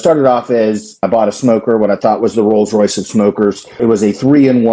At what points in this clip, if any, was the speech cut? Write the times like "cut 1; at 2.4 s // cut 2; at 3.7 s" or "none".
cut 1; at 1.0 s // cut 2; at 3.8 s

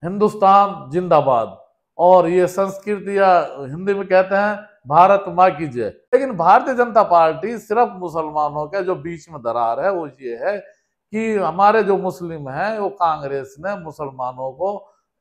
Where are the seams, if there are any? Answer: cut 1; at 6.0 s

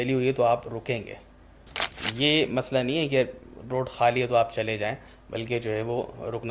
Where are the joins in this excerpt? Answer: cut 1; at 1.8 s

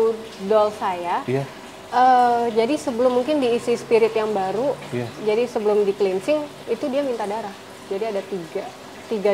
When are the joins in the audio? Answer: none

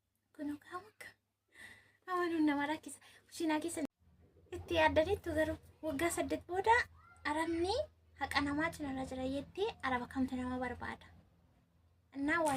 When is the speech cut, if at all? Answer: cut 1; at 3.9 s

